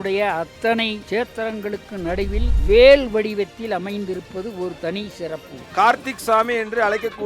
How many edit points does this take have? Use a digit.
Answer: 3